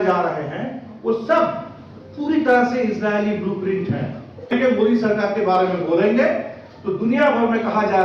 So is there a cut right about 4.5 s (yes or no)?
yes